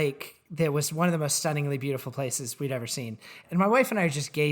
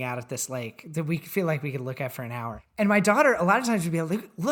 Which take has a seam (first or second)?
first